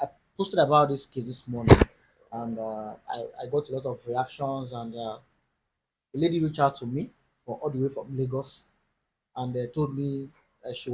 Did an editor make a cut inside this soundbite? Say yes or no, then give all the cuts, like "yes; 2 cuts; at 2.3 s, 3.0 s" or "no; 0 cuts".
yes; 1 cut; at 8.1 s